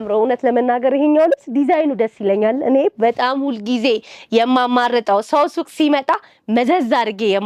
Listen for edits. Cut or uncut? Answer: uncut